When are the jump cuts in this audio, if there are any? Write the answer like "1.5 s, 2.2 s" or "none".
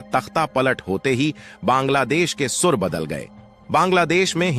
none